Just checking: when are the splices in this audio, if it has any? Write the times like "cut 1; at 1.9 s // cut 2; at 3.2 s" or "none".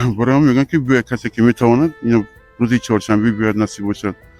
none